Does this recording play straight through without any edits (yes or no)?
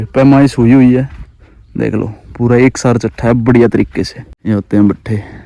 no